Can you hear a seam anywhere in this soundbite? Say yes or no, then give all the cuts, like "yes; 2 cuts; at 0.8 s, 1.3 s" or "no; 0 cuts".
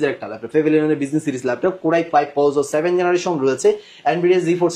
no; 0 cuts